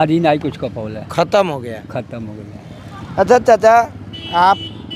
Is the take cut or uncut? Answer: uncut